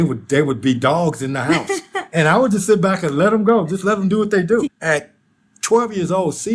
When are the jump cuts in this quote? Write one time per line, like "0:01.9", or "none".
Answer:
0:04.8